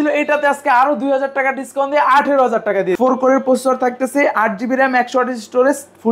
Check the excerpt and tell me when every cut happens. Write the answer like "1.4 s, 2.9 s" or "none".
2.9 s